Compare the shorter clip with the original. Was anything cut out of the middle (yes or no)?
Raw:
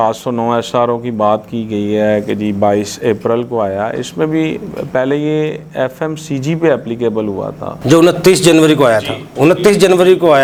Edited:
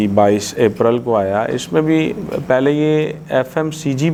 no